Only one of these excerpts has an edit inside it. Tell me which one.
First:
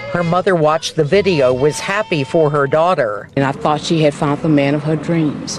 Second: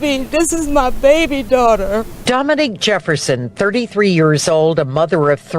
second; 1 cut; at 2.3 s

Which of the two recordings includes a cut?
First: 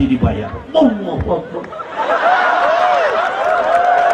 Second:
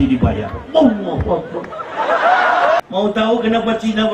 second; 1 cut; at 2.8 s

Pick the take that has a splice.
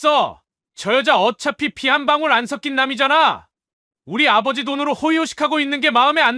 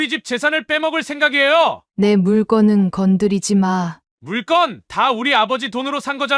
second; 1 cut; at 1.8 s

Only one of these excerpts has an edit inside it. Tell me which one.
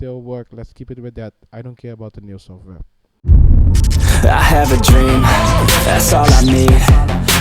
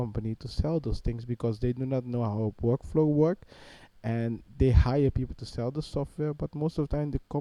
first; 1 cut; at 3.1 s

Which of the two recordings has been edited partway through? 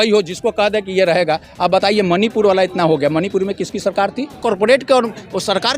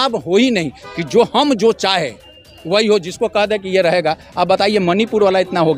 first; 1 cut; at 4.4 s

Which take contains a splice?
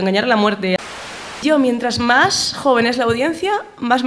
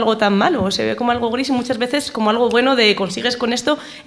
first; 1 cut; at 0.9 s

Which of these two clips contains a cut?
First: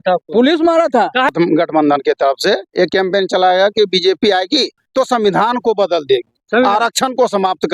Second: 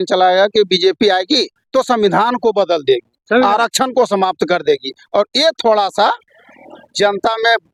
first; 1 cut; at 1.3 s

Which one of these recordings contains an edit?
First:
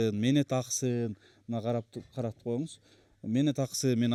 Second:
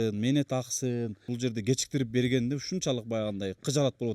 second; 1 cut; at 1.3 s

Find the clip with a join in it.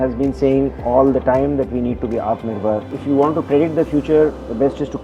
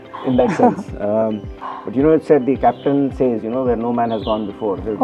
first; 1 cut; at 2.9 s

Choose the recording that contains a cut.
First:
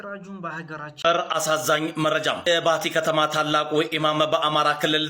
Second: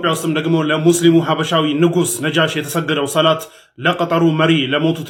first; 1 cut; at 0.9 s

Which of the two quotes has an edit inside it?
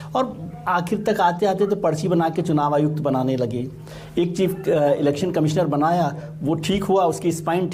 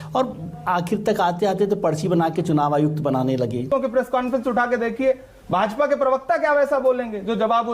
second; 1 cut; at 3.6 s

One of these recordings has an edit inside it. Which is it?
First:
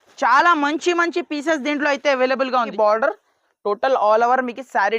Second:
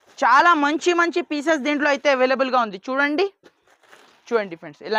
first; 1 cut; at 2.7 s

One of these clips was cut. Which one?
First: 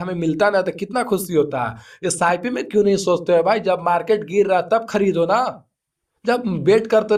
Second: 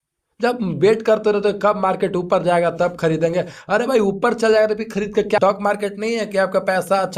second; 1 cut; at 5.4 s

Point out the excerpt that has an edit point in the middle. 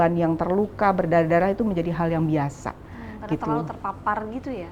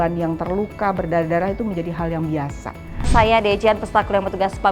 second; 1 cut; at 3.1 s

